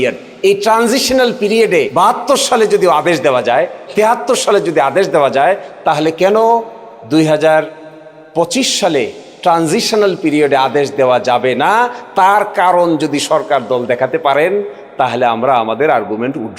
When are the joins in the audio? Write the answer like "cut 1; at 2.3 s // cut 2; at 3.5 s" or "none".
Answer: cut 1; at 1.9 s